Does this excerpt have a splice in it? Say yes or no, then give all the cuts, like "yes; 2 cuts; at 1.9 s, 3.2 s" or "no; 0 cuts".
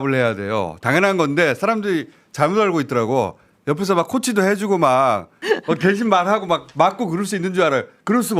yes; 1 cut; at 5.4 s